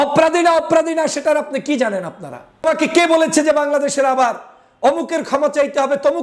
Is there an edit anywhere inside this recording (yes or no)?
yes